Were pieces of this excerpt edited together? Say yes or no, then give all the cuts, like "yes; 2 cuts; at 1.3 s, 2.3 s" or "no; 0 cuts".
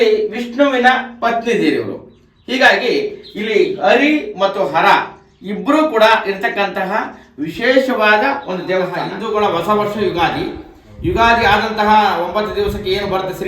yes; 1 cut; at 9.1 s